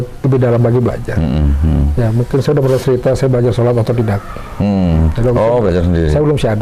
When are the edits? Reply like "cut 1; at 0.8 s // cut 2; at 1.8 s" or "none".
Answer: none